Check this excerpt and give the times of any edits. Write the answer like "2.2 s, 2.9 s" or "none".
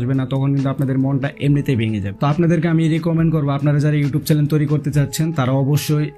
2.1 s